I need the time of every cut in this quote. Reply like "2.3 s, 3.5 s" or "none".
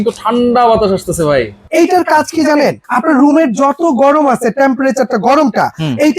1.6 s, 2.9 s